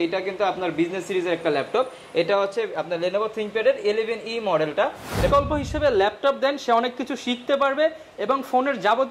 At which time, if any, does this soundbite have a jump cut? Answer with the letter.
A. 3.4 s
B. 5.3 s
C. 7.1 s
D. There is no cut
B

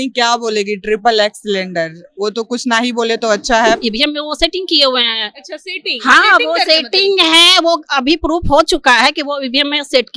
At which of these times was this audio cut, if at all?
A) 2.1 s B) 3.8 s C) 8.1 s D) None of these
B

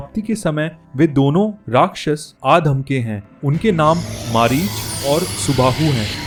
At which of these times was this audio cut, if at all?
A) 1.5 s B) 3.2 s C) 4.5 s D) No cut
D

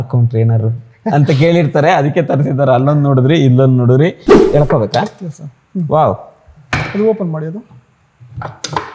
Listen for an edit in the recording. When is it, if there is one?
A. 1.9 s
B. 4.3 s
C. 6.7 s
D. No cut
B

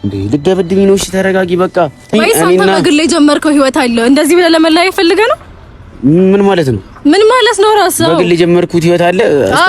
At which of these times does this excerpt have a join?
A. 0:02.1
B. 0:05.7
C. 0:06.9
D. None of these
A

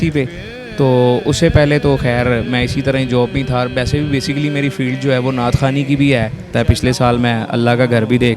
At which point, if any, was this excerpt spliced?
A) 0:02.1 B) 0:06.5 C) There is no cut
B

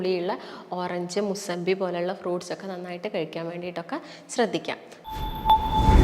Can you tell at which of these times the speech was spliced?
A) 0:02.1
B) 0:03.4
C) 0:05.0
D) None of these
C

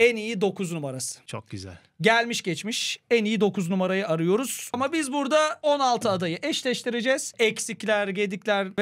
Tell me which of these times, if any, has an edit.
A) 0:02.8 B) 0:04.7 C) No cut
B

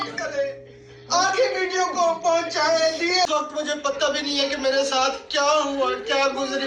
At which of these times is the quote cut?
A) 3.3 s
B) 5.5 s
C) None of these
A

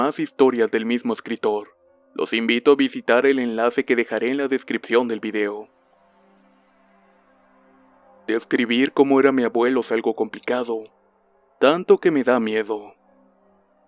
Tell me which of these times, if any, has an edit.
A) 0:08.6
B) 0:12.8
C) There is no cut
B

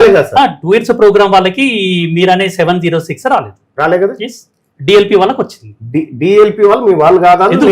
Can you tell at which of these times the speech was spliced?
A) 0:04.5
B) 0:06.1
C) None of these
C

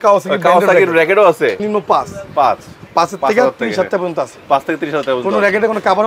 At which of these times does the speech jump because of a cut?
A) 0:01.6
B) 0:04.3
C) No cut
A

